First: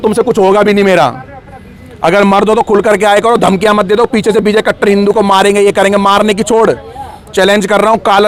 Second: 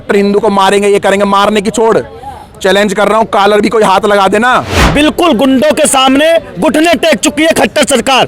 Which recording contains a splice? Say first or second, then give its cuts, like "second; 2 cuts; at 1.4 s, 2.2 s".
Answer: second; 1 cut; at 4.8 s